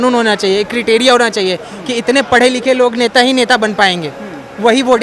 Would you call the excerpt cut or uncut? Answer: uncut